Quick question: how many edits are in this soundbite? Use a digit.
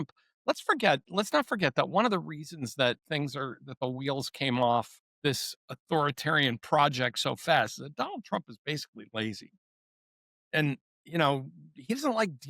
1